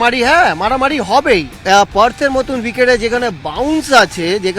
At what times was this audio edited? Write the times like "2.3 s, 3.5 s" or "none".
1.5 s